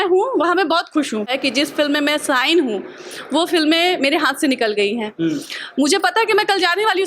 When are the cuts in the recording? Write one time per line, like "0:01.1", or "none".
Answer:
0:01.3